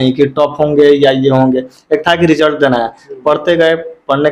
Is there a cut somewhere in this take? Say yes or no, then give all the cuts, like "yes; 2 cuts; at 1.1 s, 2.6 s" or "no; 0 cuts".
no; 0 cuts